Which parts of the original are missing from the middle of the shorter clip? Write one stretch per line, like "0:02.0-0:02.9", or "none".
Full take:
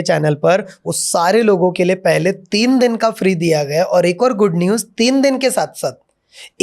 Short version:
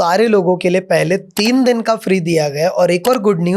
none